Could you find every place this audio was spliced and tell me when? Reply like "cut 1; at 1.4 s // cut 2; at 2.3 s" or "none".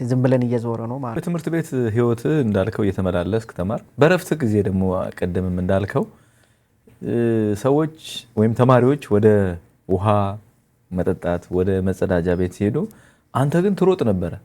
cut 1; at 1.2 s